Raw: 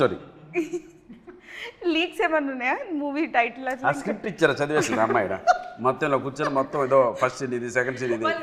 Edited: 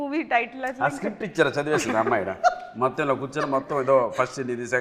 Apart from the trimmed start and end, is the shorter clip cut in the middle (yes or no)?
no